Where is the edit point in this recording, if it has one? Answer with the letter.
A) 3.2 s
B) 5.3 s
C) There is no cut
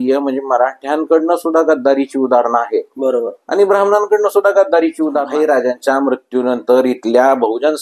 B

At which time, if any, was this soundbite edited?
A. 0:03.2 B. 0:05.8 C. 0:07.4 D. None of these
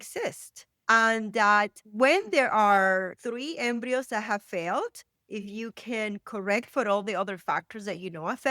A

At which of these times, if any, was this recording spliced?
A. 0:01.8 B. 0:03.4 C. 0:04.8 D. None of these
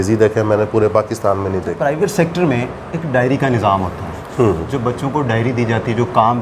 A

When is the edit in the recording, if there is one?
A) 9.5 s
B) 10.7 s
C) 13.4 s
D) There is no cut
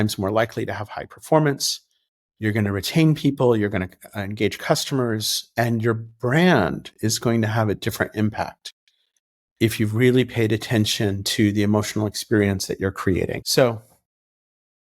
C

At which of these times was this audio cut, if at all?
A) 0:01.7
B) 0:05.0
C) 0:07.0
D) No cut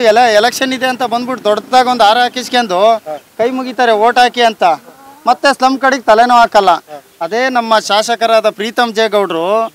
D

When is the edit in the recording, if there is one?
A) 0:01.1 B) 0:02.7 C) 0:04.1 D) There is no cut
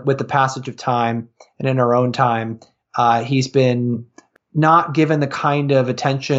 C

